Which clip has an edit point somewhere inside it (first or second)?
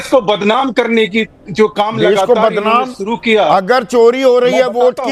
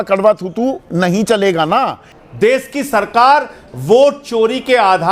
second